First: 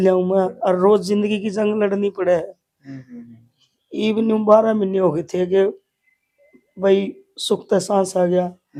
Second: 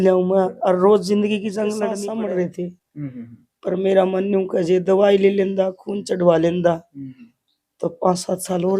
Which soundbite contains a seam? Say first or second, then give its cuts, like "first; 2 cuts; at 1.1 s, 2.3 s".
second; 1 cut; at 2.0 s